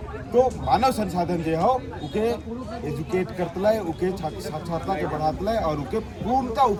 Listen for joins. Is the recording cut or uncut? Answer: uncut